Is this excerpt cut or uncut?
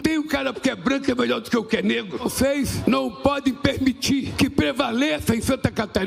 uncut